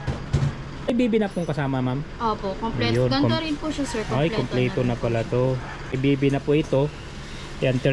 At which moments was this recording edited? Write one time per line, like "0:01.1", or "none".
0:00.9
0:06.0